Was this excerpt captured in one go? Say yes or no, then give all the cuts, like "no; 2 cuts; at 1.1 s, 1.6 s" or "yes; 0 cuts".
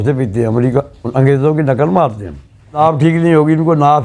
no; 1 cut; at 2.8 s